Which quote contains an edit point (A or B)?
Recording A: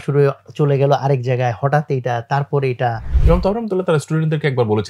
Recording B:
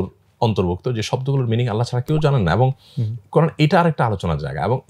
A